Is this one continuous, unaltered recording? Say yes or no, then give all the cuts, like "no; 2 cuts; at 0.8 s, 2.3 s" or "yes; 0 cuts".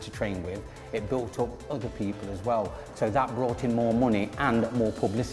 yes; 0 cuts